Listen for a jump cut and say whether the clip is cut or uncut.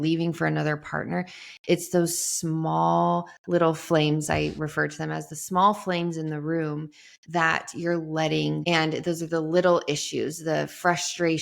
cut